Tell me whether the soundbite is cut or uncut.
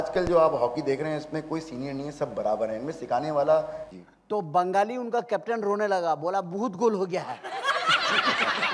cut